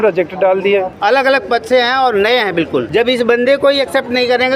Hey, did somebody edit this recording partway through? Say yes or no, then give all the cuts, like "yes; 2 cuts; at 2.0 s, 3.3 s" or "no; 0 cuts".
yes; 2 cuts; at 0.9 s, 2.9 s